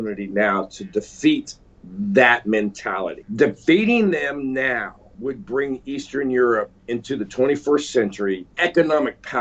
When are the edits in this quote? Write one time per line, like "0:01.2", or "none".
0:03.2
0:05.0
0:06.8
0:08.5